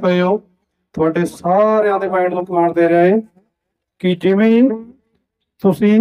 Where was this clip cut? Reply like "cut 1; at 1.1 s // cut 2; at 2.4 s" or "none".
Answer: none

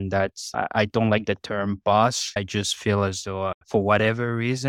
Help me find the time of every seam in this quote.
cut 1; at 3.6 s

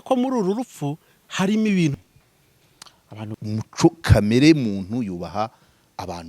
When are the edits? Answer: cut 1; at 3.3 s

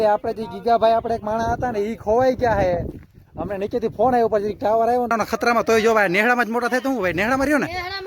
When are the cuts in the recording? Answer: cut 1; at 5.1 s

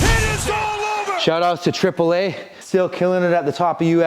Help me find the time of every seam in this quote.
cut 1; at 1.2 s

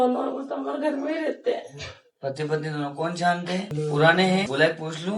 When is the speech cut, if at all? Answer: cut 1; at 3.7 s // cut 2; at 4.5 s

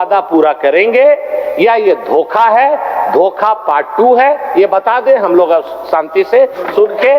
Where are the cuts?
none

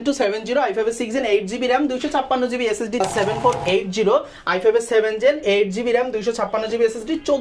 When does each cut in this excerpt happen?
cut 1; at 3.0 s

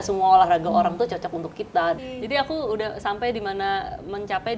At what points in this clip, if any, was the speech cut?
cut 1; at 2.0 s

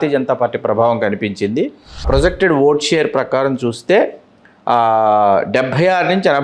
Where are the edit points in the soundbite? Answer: cut 1; at 2.1 s

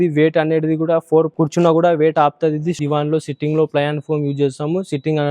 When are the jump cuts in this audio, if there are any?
cut 1; at 2.8 s

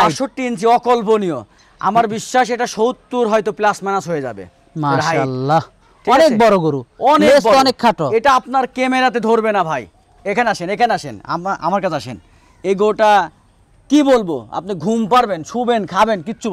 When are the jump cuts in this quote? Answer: none

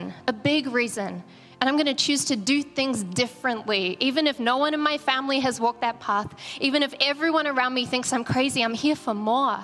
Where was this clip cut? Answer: none

